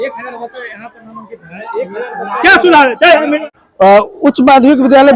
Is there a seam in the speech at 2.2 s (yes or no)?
no